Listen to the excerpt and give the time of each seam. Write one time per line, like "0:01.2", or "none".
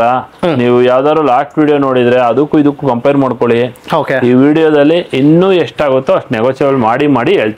none